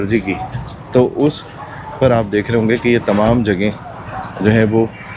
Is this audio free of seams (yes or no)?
yes